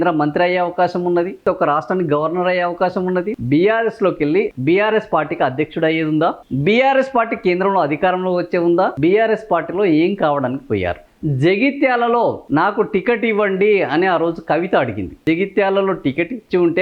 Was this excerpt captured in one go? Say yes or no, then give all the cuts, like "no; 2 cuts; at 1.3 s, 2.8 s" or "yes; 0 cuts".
no; 8 cuts; at 1.4 s, 3.4 s, 4.5 s, 6.5 s, 8.9 s, 11.0 s, 12.4 s, 15.2 s